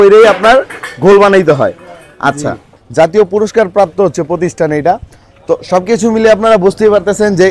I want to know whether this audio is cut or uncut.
cut